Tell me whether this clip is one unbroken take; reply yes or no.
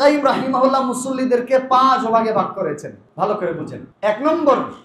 no